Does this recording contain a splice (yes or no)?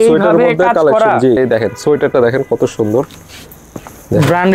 yes